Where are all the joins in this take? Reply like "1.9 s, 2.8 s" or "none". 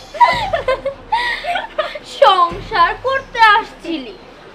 none